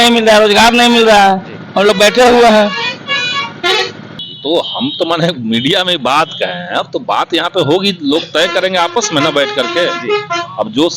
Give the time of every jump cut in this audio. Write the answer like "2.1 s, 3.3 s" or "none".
4.3 s